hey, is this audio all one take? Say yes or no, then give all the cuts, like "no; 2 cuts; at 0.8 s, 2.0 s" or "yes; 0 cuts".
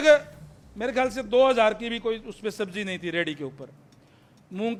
yes; 0 cuts